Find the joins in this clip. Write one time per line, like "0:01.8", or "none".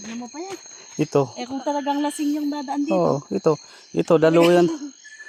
none